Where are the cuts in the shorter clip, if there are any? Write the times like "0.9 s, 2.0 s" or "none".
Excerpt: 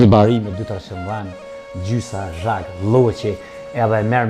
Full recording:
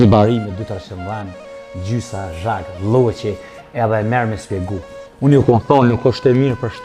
none